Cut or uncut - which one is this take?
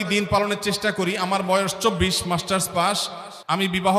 uncut